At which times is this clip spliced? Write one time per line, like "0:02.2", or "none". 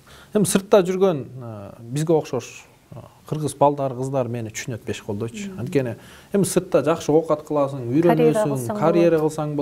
none